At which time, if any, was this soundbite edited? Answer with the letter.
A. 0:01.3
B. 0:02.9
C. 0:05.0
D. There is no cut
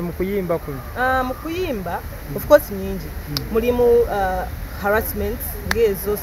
D